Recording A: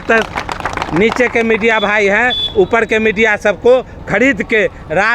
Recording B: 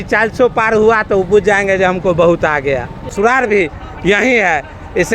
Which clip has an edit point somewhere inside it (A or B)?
B